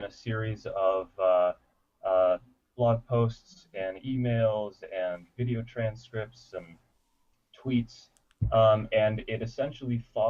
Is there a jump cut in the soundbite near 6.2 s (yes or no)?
no